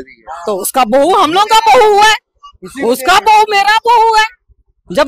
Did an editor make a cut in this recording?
no; 0 cuts

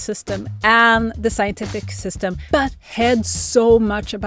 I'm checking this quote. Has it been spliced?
yes; 1 cut; at 2.4 s

